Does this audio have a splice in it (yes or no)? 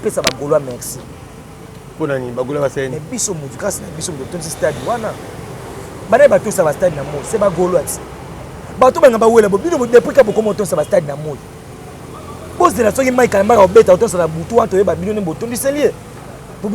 no